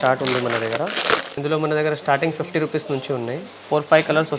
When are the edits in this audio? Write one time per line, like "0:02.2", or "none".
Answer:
0:01.3
0:03.5